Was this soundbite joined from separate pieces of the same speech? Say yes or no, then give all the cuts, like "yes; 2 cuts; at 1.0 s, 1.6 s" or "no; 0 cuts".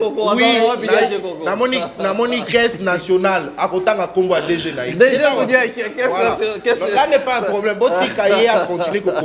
no; 0 cuts